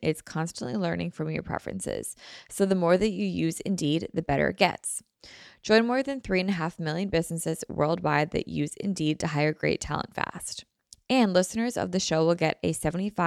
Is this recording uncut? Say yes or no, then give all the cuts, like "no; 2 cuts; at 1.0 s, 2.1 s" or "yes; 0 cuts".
yes; 0 cuts